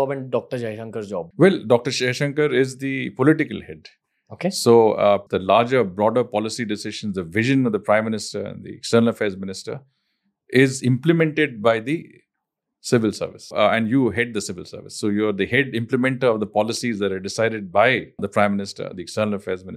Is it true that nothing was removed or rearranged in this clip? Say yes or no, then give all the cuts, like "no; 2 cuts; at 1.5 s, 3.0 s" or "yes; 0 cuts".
no; 4 cuts; at 1.3 s, 5.2 s, 13.5 s, 18.2 s